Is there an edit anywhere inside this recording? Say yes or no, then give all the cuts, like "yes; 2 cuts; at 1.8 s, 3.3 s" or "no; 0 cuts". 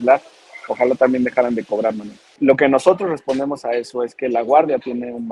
yes; 1 cut; at 2.2 s